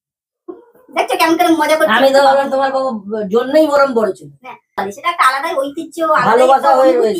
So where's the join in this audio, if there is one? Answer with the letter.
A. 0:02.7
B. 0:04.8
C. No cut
B